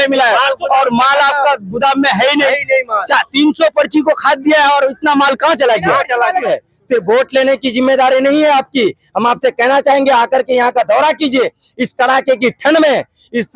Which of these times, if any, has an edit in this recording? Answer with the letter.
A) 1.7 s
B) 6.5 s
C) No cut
B